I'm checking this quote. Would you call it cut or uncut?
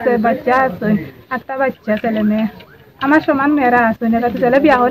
uncut